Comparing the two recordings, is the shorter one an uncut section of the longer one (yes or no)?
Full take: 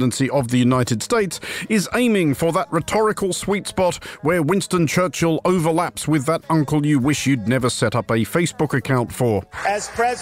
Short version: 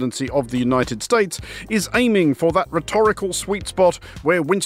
yes